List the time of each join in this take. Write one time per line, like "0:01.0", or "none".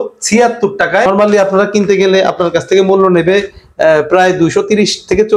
0:01.1